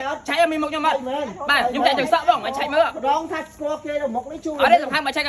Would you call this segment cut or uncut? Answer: uncut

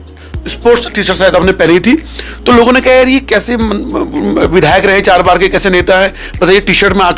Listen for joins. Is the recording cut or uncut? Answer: uncut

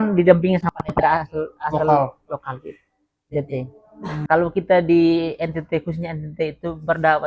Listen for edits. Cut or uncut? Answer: cut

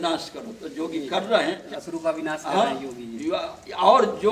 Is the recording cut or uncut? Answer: cut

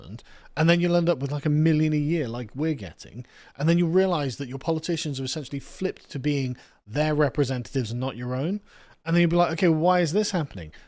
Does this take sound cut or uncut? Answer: uncut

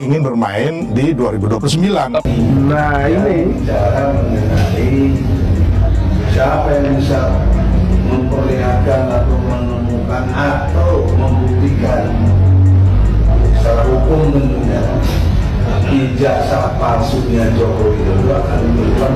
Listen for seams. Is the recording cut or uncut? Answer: cut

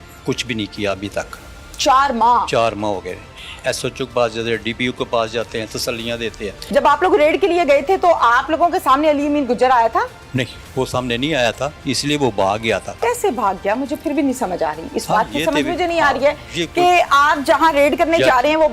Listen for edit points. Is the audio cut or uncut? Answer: cut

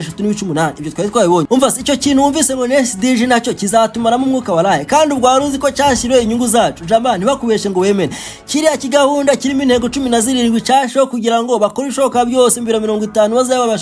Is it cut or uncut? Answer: uncut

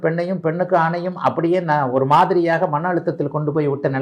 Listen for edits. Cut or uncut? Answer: uncut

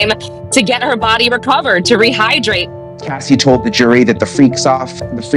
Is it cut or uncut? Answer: cut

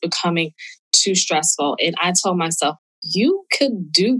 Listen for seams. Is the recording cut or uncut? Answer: cut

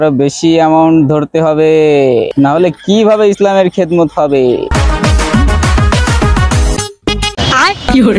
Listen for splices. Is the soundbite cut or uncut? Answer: cut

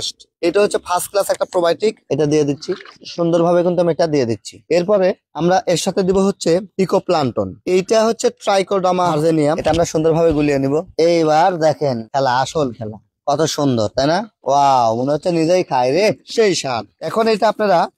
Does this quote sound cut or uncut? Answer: cut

